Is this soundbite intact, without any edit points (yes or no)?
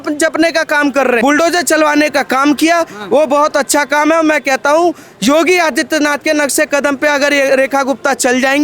no